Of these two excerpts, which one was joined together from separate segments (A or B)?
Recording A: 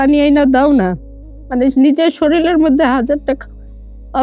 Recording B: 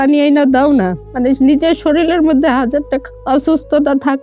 B